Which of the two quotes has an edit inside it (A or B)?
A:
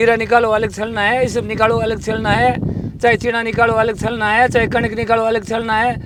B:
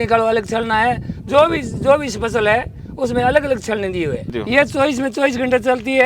B